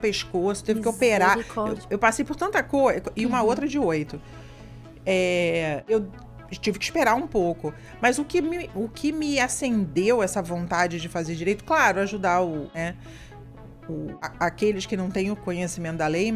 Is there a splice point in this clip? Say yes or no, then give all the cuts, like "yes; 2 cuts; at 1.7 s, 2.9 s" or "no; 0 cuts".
yes; 3 cuts; at 5.9 s, 12.7 s, 14.2 s